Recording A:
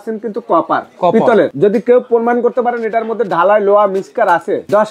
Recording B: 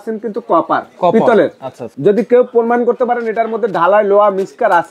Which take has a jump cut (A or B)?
A